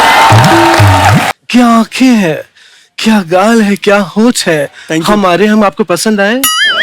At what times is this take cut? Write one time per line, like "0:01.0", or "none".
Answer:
0:01.4